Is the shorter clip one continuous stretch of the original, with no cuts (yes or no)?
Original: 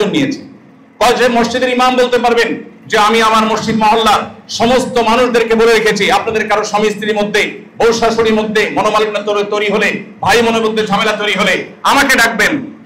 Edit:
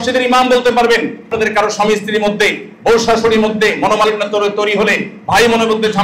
no